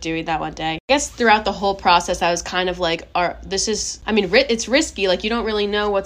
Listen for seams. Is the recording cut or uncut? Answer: cut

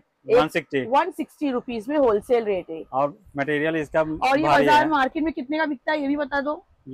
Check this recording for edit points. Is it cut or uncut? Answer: uncut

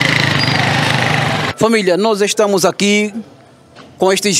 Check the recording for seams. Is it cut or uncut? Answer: cut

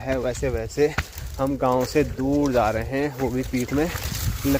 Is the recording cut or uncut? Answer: uncut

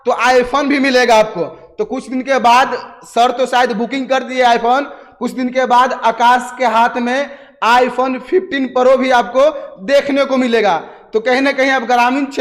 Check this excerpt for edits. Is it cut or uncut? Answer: uncut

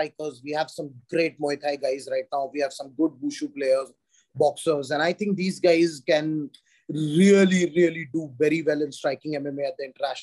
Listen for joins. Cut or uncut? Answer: uncut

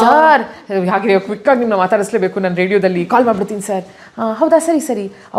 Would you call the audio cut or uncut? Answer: uncut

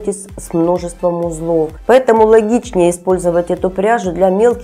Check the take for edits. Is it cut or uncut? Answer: cut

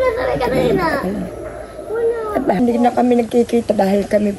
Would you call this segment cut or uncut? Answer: cut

